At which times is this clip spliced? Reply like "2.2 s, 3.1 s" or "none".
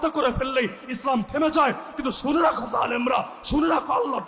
none